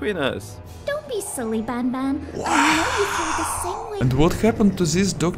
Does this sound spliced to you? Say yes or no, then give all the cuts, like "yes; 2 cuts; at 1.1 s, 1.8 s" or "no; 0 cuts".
yes; 1 cut; at 3.9 s